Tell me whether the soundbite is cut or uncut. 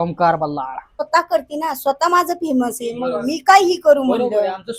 cut